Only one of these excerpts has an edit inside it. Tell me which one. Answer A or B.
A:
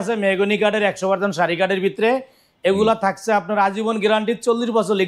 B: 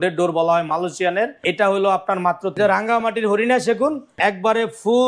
B